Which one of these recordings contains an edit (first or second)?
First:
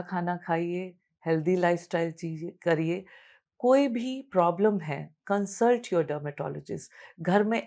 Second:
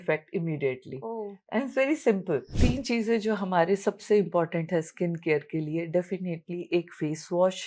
second